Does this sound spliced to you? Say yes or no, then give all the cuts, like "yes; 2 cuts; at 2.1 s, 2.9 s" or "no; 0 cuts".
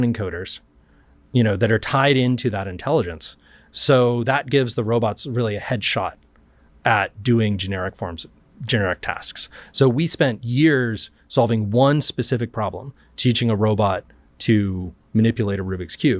no; 0 cuts